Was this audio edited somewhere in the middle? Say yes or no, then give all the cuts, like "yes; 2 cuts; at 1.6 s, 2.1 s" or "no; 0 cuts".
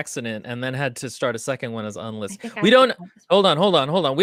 no; 0 cuts